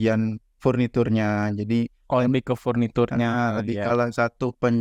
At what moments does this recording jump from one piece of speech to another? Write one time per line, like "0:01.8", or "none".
0:03.9